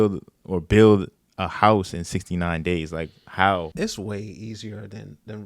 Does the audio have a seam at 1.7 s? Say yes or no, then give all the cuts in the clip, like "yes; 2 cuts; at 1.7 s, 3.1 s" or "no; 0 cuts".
no; 1 cut; at 3.7 s